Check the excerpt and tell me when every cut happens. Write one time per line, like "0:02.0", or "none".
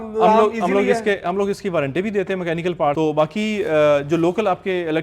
0:03.0